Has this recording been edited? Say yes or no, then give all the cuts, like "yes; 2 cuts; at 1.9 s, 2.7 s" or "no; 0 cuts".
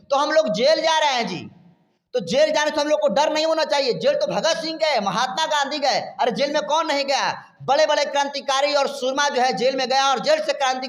no; 0 cuts